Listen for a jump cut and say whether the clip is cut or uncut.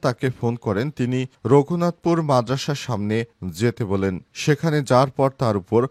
uncut